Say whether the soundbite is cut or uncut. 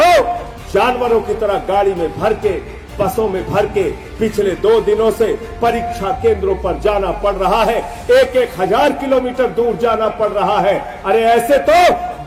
uncut